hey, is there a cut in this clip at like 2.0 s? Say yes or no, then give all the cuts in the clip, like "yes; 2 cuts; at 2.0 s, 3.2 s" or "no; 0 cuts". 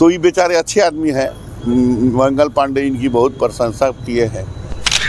no; 0 cuts